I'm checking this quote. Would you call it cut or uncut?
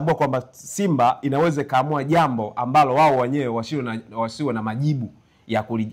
uncut